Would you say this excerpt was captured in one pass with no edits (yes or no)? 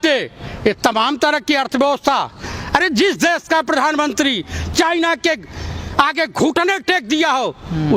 yes